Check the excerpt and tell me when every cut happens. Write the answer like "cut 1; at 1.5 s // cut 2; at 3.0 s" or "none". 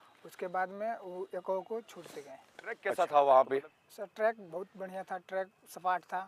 cut 1; at 2.9 s

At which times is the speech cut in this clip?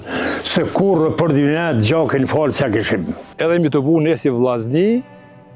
cut 1; at 3.2 s

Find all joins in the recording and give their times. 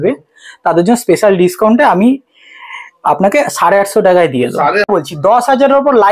cut 1; at 4.9 s

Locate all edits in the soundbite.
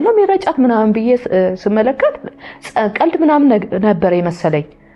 none

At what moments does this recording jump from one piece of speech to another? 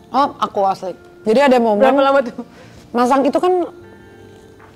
cut 1; at 1.1 s

